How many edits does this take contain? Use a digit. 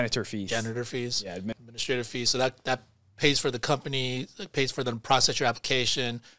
1